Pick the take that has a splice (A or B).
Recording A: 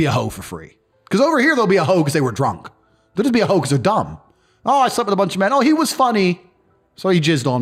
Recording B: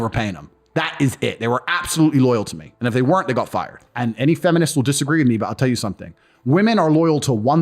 B